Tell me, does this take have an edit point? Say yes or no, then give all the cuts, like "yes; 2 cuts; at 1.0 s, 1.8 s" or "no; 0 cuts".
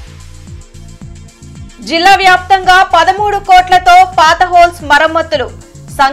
yes; 1 cut; at 1.6 s